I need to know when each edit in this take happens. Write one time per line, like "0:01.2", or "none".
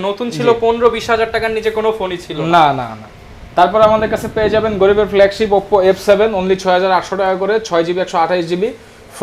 none